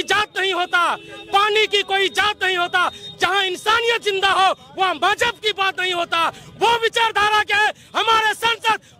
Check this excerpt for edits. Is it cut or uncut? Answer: uncut